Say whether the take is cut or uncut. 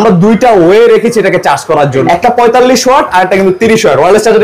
cut